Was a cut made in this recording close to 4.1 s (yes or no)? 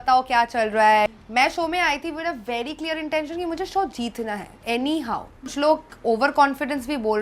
no